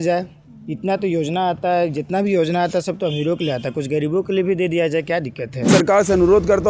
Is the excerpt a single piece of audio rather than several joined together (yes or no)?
no